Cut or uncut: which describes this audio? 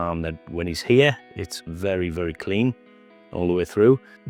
uncut